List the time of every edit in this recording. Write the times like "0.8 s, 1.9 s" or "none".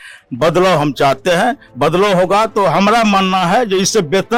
none

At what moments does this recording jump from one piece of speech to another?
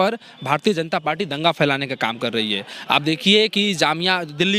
none

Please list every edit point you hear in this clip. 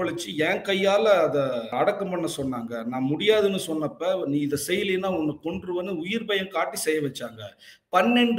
1.7 s

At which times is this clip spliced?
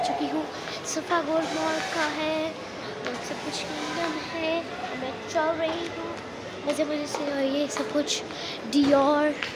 none

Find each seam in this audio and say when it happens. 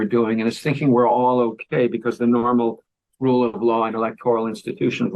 none

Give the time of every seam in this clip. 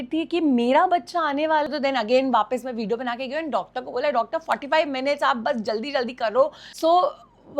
1.7 s, 6.6 s

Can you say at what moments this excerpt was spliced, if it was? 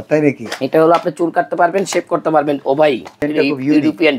3.2 s

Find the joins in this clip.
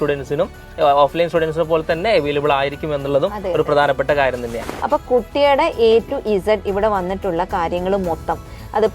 4.6 s

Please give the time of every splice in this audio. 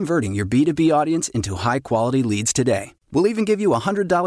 none

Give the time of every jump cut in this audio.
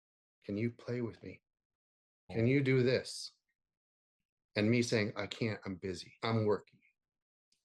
2.3 s, 6.1 s

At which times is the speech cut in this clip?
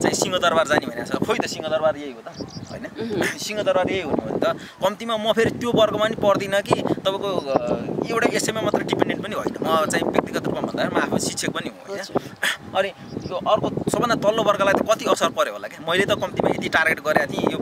none

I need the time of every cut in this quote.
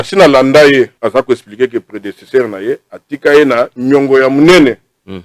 0.9 s

